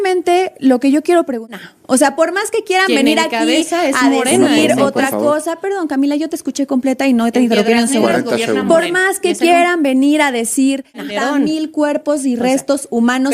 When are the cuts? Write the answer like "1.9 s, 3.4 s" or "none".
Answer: 1.5 s, 11.0 s